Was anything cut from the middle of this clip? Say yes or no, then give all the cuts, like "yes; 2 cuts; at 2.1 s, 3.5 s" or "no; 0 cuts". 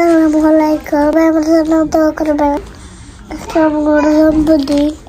yes; 2 cuts; at 1.1 s, 2.6 s